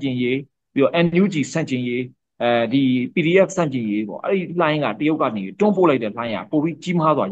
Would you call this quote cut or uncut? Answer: uncut